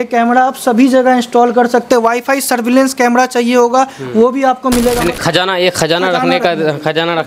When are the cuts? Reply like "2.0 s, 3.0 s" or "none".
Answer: 5.0 s